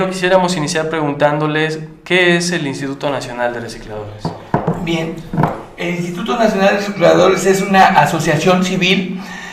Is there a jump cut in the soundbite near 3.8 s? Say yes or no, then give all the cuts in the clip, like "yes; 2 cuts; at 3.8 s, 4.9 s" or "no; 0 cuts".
yes; 1 cut; at 3.8 s